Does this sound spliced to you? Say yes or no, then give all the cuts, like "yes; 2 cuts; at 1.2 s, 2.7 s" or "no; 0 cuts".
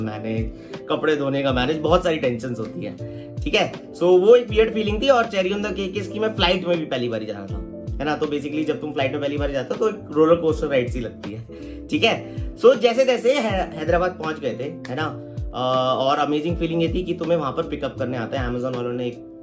no; 0 cuts